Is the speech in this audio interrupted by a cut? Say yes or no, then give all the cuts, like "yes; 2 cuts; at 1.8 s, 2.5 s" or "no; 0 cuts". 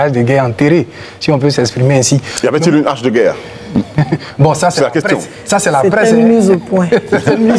no; 0 cuts